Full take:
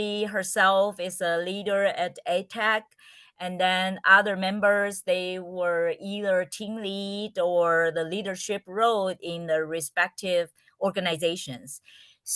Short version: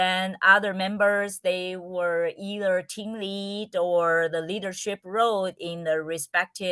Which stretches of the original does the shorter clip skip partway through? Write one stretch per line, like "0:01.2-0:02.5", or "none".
none